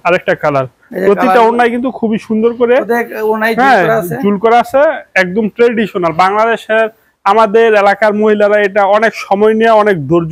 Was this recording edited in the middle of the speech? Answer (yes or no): no